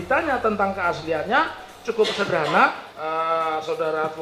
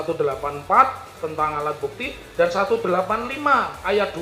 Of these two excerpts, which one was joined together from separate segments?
first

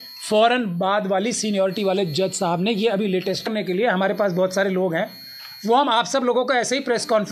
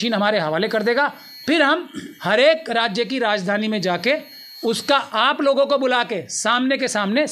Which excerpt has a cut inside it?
first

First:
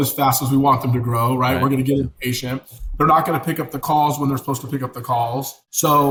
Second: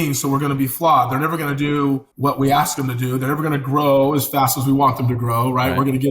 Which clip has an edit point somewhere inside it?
second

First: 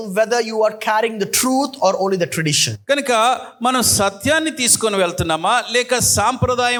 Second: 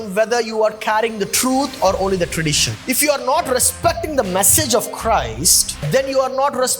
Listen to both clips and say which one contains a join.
second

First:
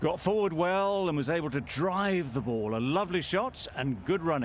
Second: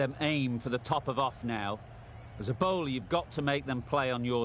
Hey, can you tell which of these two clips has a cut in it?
first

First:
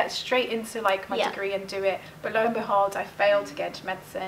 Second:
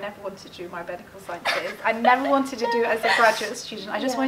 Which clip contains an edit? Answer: first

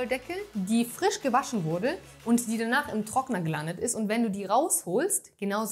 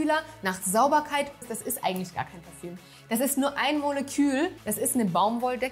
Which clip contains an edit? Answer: second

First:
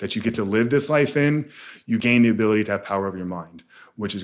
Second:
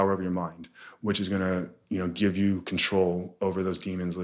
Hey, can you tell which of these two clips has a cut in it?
first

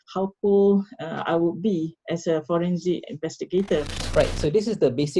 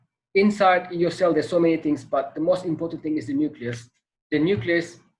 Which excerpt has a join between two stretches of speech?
first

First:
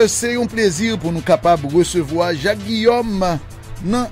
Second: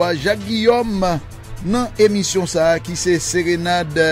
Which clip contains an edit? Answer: first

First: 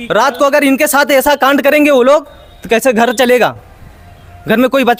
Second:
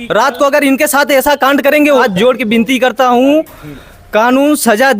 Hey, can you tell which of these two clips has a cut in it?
second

